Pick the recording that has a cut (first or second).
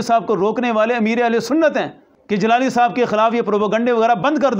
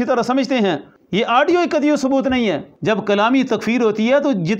second